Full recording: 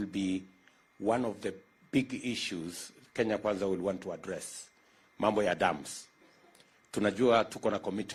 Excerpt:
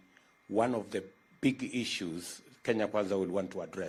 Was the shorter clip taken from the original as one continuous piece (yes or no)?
yes